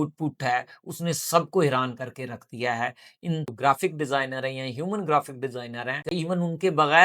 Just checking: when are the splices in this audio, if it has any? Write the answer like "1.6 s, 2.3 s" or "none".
3.5 s, 6.1 s